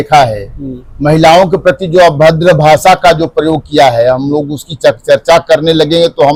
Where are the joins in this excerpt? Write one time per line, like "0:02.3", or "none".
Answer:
none